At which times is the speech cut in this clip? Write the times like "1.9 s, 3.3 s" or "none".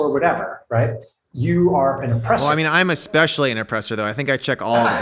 2.4 s